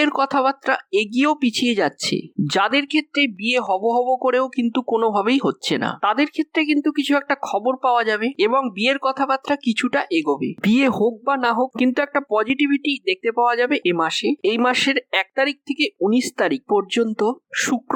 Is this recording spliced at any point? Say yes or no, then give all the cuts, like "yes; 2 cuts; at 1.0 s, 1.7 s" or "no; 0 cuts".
no; 0 cuts